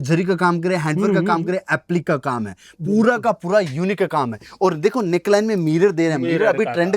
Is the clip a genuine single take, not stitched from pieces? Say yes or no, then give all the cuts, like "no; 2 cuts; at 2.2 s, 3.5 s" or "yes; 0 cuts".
yes; 0 cuts